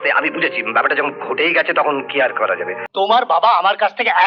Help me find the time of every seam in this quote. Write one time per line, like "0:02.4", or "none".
0:02.8